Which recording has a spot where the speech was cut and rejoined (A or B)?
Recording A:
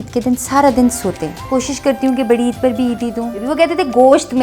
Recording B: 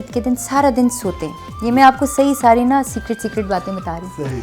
A